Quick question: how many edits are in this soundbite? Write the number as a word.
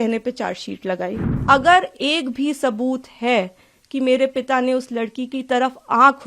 one